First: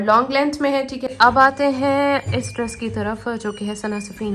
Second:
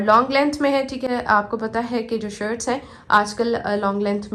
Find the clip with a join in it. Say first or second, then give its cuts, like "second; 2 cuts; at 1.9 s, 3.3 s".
first; 1 cut; at 1.0 s